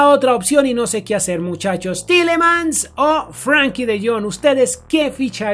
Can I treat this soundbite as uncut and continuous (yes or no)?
yes